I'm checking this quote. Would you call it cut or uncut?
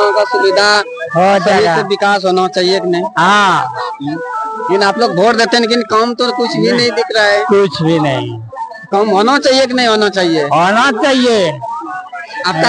uncut